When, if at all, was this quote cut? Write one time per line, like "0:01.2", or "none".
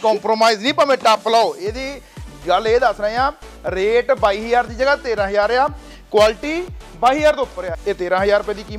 0:07.7